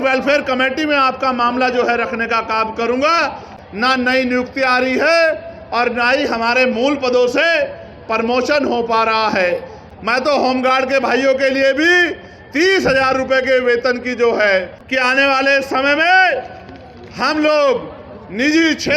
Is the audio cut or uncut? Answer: cut